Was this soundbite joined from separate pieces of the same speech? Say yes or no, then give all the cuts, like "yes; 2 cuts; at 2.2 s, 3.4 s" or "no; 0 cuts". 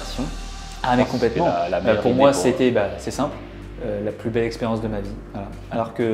no; 0 cuts